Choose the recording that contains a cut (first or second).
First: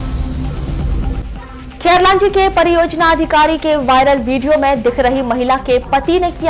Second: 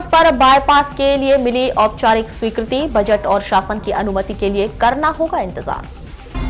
first